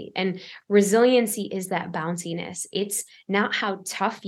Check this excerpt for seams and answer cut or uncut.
uncut